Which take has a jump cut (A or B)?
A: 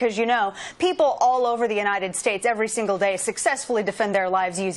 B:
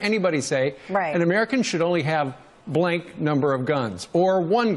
B